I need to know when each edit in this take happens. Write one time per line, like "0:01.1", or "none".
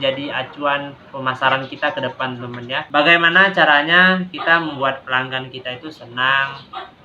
0:02.7